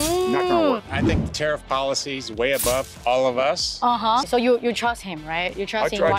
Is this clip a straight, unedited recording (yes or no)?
no